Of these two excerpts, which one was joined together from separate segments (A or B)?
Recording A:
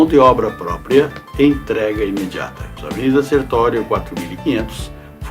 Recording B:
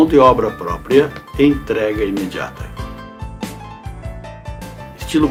A